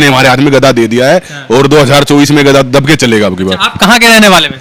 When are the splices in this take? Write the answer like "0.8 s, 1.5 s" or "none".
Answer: none